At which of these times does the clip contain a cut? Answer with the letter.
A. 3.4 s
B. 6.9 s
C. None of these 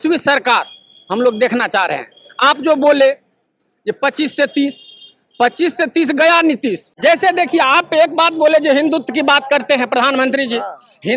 B